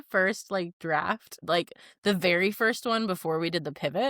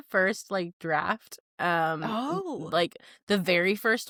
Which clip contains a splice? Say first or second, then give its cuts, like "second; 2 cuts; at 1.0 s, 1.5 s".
first; 1 cut; at 1.3 s